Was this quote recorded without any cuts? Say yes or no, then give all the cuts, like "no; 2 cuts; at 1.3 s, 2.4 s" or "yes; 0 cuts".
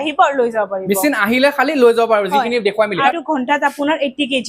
no; 1 cut; at 3.1 s